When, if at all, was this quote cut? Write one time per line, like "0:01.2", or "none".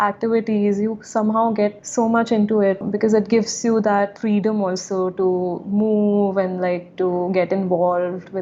0:01.8
0:02.8